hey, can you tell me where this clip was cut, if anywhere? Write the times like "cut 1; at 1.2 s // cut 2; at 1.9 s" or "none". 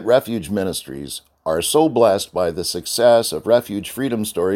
none

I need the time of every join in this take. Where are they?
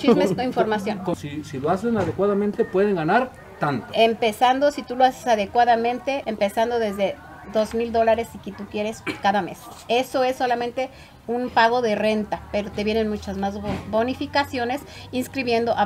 cut 1; at 1.1 s // cut 2; at 6.3 s

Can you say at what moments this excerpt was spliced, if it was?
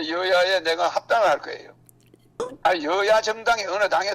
cut 1; at 2.4 s

